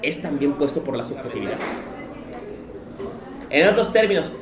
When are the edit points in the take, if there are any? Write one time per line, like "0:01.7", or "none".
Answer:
0:01.8

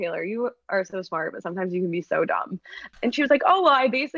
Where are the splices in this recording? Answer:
0:02.8

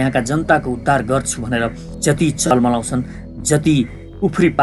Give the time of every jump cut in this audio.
0:01.8

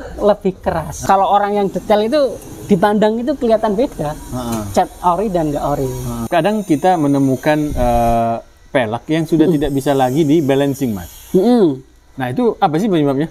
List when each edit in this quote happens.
0:01.0
0:06.2

